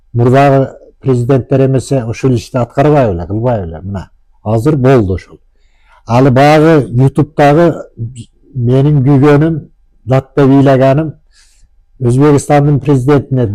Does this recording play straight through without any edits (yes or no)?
yes